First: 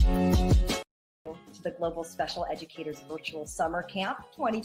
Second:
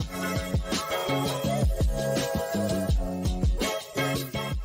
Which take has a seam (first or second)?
second